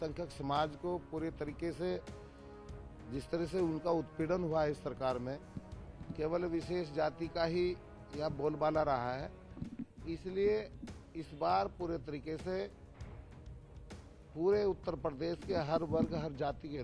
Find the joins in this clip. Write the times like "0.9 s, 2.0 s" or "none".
none